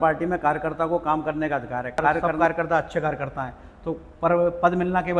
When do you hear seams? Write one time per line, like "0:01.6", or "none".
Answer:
0:02.3